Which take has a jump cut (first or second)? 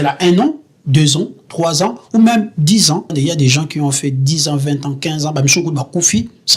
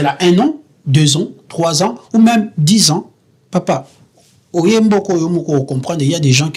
first